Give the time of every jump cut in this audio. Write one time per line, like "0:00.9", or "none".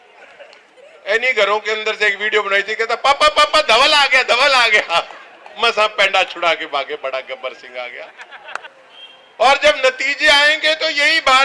0:08.7